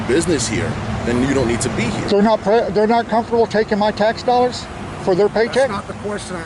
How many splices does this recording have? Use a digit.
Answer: 0